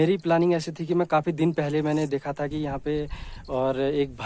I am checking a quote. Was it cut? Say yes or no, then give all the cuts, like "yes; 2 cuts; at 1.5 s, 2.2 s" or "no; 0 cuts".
no; 0 cuts